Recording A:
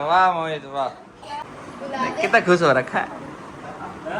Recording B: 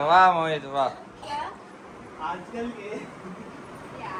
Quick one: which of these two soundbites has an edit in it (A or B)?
A